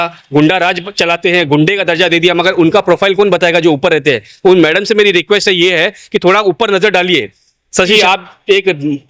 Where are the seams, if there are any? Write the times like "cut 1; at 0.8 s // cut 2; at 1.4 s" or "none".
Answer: cut 1; at 7.9 s